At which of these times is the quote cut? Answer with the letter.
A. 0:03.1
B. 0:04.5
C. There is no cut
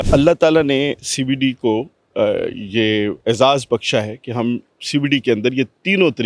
C